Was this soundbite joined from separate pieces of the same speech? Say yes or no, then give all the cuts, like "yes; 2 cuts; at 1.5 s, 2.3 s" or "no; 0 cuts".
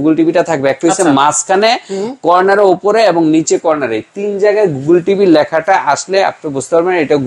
no; 0 cuts